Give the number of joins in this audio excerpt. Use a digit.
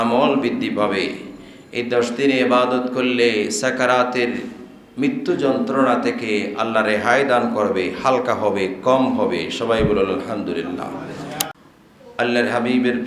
1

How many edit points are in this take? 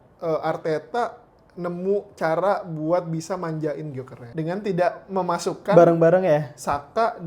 1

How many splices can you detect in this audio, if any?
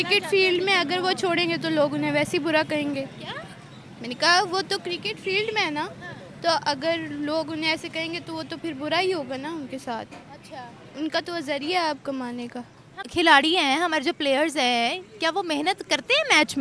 1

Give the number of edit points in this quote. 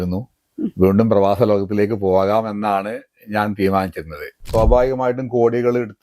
1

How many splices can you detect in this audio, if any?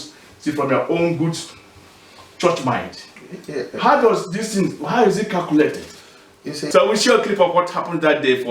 1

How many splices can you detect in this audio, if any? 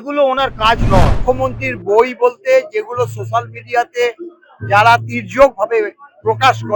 1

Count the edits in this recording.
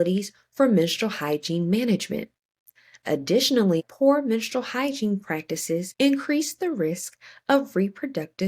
2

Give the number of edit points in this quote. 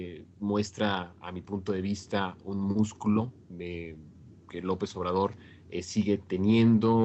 1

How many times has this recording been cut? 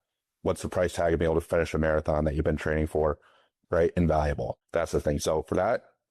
2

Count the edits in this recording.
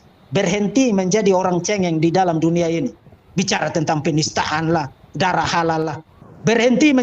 2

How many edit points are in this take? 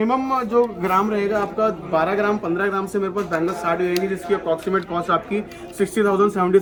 0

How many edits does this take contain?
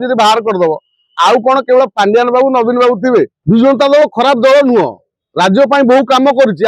1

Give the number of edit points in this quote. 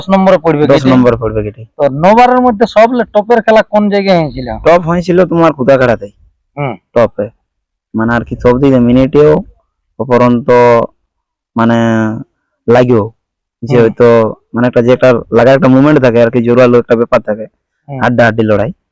0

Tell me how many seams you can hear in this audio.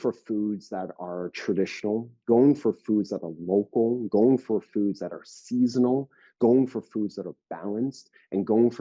0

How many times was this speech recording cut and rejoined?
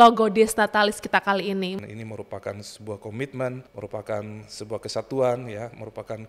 2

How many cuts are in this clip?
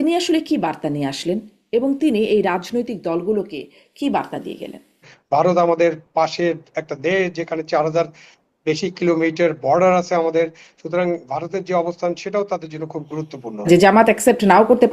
2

